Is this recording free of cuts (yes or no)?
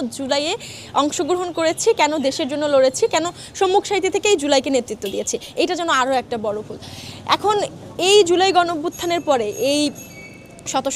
yes